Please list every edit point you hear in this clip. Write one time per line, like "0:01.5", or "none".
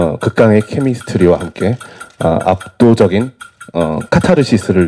none